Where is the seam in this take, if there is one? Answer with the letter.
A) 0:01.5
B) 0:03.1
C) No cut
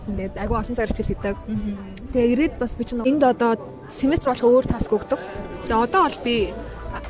B